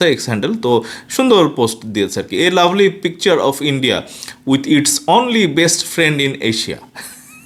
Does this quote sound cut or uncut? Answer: uncut